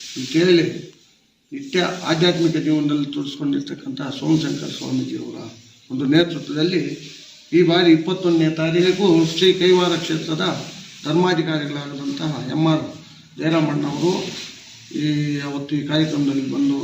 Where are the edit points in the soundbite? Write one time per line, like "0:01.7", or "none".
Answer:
0:08.8